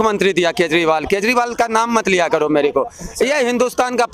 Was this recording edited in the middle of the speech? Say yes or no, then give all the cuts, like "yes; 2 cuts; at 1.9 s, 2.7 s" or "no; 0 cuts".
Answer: no; 0 cuts